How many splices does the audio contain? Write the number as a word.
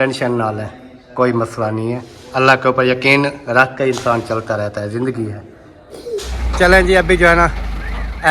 two